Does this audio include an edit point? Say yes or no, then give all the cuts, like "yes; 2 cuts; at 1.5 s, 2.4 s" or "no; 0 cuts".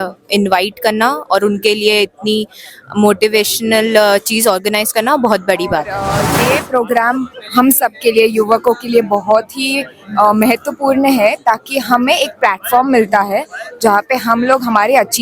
yes; 1 cut; at 6.0 s